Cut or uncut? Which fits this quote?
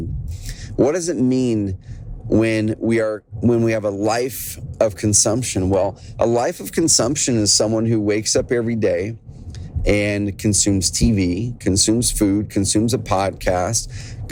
uncut